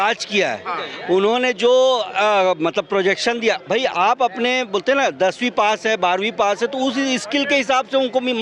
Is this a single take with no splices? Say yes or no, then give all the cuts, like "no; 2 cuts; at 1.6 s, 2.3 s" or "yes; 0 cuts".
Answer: yes; 0 cuts